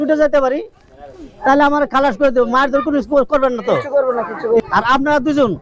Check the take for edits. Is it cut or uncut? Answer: cut